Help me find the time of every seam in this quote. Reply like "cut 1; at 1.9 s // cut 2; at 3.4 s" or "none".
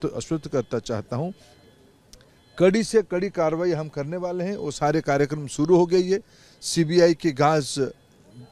none

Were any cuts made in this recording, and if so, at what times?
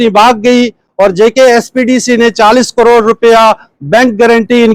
none

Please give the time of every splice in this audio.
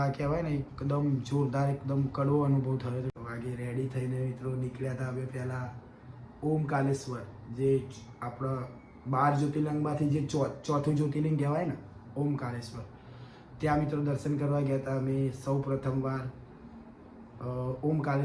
cut 1; at 3.1 s

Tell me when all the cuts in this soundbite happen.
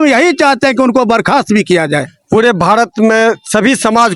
cut 1; at 2.1 s

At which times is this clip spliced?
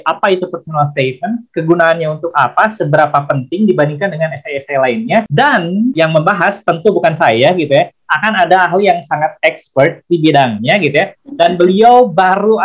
cut 1; at 5.6 s

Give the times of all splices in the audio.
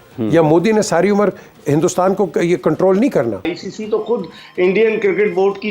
cut 1; at 3.6 s

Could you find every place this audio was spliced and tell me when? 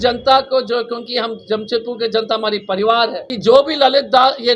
cut 1; at 3.2 s

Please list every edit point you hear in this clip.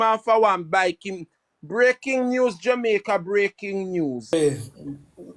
cut 1; at 4.3 s

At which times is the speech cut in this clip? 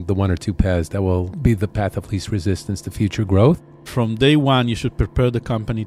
cut 1; at 1.3 s // cut 2; at 3.9 s

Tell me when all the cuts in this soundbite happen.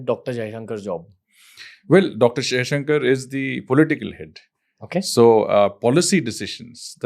none

